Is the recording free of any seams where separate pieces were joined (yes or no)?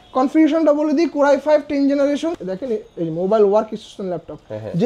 no